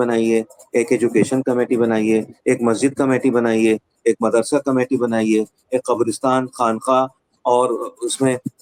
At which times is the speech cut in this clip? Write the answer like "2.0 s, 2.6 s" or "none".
none